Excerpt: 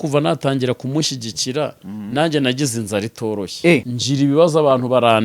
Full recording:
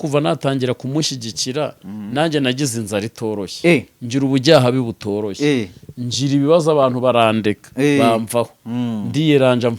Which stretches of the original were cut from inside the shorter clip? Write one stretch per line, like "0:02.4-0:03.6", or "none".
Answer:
0:03.9-0:06.1